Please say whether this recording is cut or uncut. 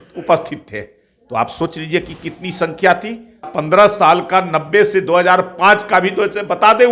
cut